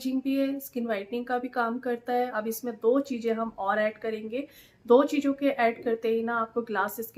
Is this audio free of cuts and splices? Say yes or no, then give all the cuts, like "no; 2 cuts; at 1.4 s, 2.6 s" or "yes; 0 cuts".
no; 1 cut; at 2.3 s